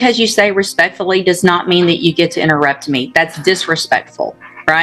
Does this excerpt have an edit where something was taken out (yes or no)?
no